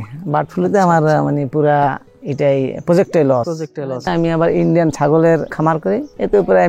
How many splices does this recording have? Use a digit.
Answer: 2